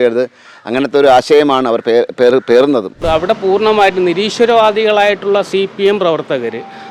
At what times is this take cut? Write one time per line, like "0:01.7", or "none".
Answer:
0:03.0